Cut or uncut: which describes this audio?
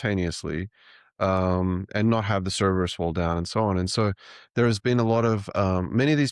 uncut